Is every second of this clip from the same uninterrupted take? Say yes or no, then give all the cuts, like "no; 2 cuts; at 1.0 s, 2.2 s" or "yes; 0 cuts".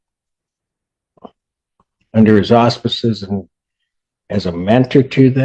yes; 0 cuts